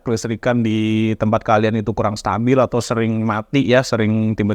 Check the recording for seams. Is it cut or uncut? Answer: uncut